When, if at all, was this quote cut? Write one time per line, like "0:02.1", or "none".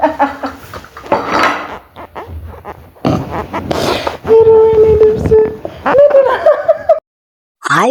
none

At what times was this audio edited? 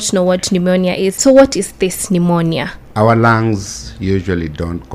0:01.1
0:02.8

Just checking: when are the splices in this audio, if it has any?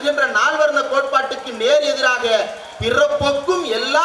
none

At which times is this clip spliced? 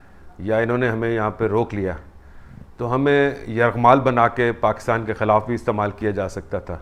none

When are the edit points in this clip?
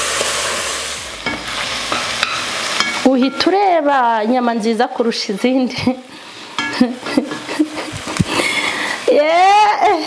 0:00.9

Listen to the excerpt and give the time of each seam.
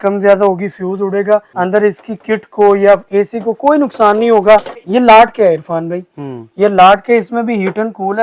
0:01.5
0:04.8

